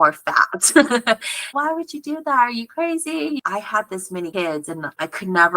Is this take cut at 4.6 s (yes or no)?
no